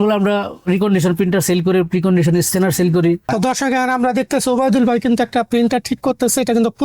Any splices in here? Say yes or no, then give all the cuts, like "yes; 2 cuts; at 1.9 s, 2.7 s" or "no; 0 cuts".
yes; 1 cut; at 3.2 s